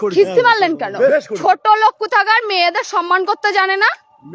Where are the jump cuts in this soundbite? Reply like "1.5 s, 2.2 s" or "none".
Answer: 1.1 s